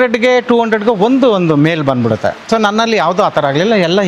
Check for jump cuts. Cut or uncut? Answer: uncut